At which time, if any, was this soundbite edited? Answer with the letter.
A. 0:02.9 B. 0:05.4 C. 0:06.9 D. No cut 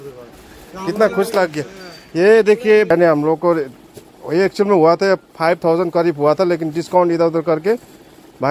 A